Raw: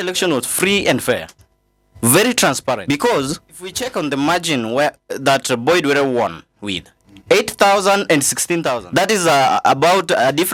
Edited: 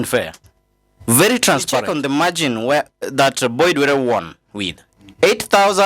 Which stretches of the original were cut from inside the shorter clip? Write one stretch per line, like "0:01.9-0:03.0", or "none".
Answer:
0:02.8-0:03.9